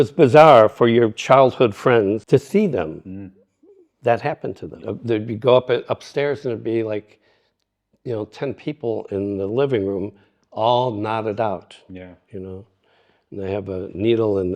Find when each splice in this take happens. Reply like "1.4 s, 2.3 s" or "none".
2.2 s, 4.8 s